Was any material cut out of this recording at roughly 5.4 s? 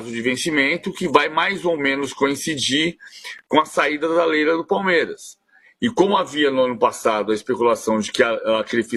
no; 0 cuts

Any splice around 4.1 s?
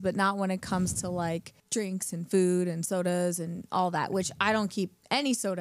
no; 1 cut; at 1.6 s

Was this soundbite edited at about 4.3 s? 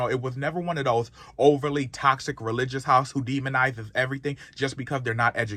no; 0 cuts

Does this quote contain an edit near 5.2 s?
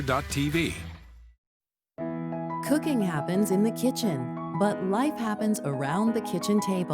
no; 1 cut; at 1.0 s

